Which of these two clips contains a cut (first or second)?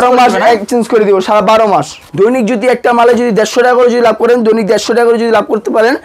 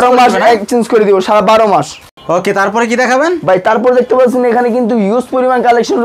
first